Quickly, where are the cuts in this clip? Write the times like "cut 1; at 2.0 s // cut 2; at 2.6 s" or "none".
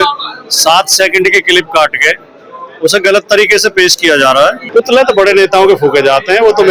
cut 1; at 4.6 s